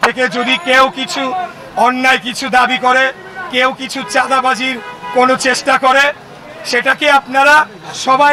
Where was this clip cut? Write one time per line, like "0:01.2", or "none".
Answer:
none